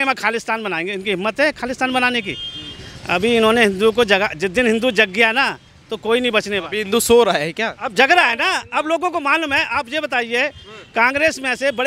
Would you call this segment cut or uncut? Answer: uncut